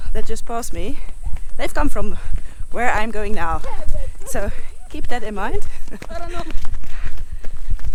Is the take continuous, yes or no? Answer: yes